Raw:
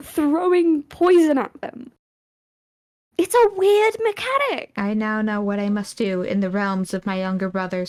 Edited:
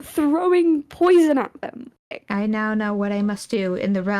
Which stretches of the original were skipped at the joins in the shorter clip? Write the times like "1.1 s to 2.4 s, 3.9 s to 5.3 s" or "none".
2.2 s to 4.7 s